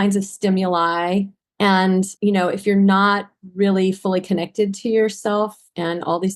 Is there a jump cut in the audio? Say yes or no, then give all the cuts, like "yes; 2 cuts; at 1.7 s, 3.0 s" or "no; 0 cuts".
yes; 2 cuts; at 1.4 s, 2.1 s